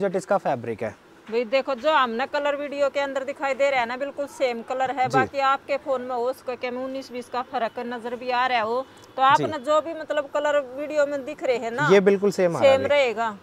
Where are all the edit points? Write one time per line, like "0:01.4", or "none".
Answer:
none